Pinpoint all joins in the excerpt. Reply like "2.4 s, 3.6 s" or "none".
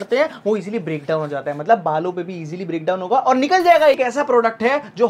4.0 s